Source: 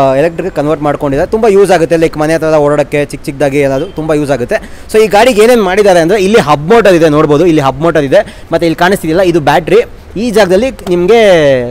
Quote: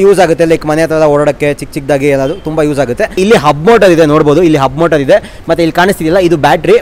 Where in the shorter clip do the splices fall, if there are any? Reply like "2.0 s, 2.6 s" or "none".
3.2 s